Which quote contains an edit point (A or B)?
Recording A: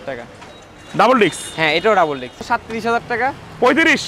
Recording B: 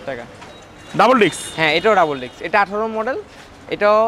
A